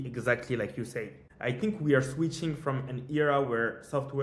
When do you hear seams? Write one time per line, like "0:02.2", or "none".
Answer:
0:01.2